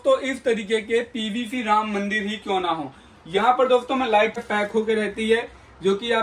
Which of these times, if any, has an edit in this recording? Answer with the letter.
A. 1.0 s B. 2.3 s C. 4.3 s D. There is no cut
C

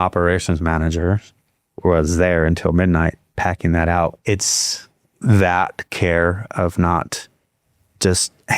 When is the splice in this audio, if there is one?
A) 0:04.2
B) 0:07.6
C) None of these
A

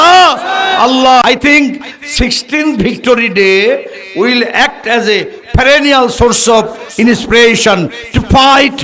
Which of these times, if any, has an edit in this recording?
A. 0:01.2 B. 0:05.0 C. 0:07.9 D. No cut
A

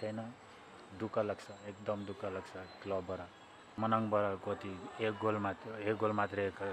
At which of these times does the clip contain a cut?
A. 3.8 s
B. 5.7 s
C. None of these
A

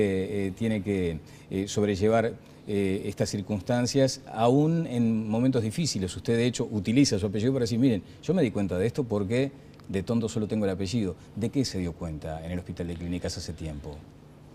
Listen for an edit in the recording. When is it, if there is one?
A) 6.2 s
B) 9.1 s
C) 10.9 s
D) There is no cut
D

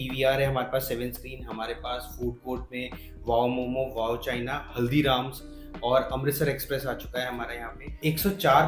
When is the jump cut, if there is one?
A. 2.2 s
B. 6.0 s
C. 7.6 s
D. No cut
D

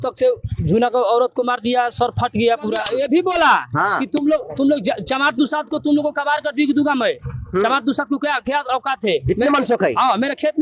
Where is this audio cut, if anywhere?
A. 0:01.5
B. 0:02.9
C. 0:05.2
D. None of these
B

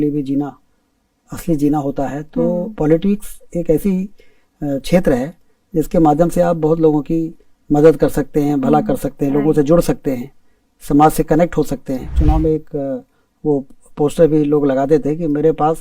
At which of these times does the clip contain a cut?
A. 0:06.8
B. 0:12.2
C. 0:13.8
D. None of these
B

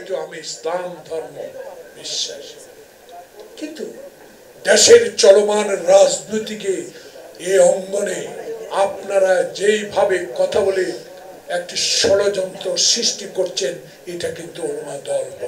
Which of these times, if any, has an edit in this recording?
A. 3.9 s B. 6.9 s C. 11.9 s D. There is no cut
D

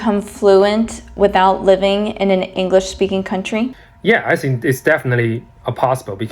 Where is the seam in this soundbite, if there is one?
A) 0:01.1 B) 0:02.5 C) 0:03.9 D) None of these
C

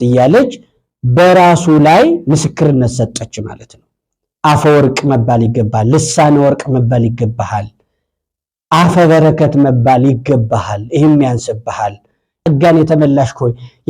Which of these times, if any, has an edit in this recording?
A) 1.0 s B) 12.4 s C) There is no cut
B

